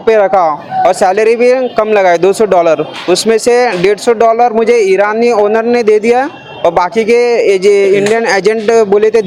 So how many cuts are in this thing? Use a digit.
0